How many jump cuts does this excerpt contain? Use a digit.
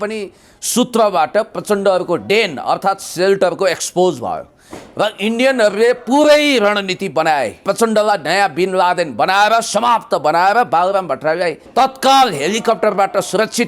2